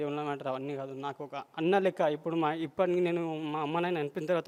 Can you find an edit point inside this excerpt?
no; 0 cuts

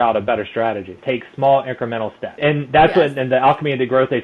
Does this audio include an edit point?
yes; 2 cuts; at 1.0 s, 2.4 s

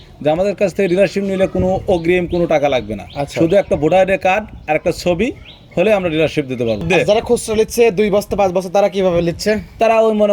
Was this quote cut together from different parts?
yes; 1 cut; at 6.8 s

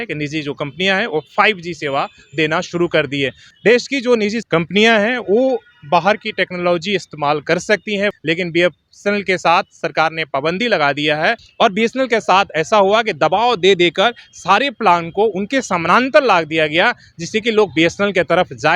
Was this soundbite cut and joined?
yes; 4 cuts; at 3.4 s, 4.4 s, 8.2 s, 11.4 s

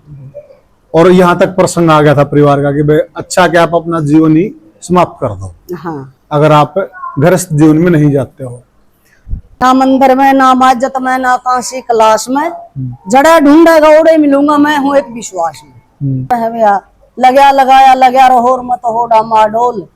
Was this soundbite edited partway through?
yes; 2 cuts; at 9.4 s, 16.3 s

